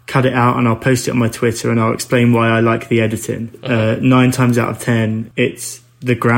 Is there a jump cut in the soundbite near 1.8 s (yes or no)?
no